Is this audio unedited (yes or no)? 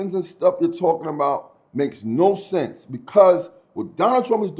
yes